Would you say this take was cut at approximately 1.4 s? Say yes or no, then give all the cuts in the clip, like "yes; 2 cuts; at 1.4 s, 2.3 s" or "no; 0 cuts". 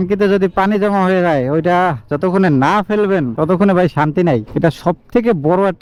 no; 0 cuts